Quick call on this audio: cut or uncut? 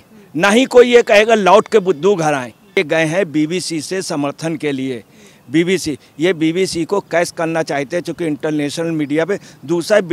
cut